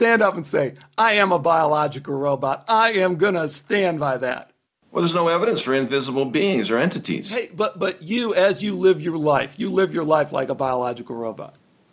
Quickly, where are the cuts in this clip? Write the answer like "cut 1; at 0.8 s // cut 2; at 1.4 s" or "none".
none